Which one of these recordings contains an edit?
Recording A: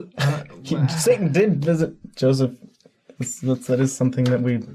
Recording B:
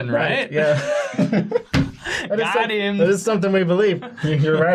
B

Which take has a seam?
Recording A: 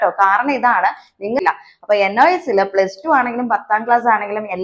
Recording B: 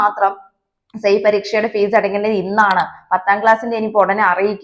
A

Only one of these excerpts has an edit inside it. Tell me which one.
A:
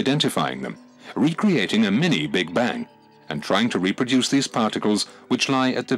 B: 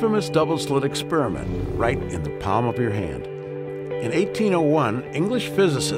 A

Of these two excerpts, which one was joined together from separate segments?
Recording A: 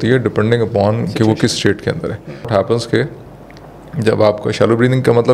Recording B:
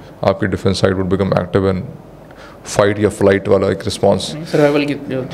A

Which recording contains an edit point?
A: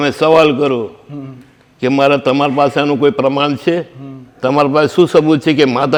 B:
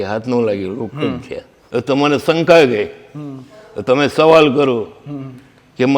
B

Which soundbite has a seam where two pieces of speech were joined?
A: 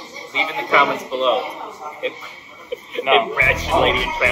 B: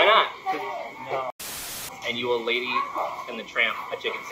B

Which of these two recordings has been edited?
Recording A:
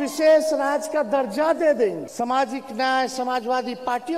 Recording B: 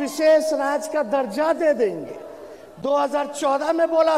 A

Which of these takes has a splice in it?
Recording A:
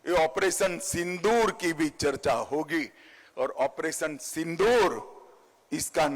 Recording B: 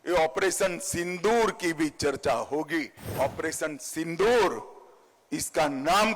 B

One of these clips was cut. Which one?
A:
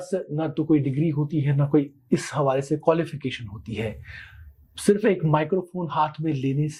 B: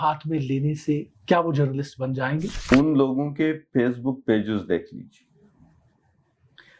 B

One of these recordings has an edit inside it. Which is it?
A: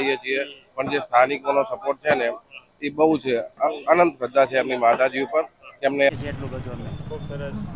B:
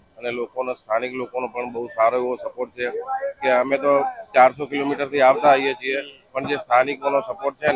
A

